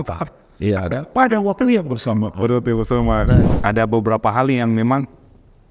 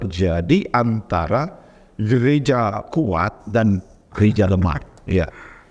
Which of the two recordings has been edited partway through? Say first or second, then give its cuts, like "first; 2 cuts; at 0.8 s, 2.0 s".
first; 1 cut; at 3.4 s